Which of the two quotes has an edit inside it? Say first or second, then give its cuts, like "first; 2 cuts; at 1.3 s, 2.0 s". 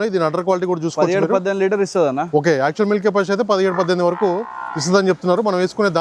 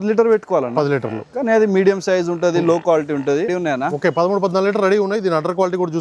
second; 1 cut; at 3.5 s